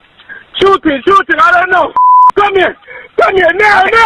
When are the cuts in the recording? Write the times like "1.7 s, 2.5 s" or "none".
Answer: none